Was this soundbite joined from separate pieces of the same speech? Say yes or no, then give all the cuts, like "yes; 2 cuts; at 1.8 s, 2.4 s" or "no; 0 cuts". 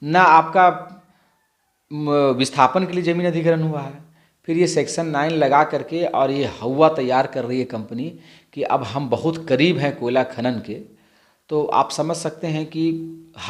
no; 0 cuts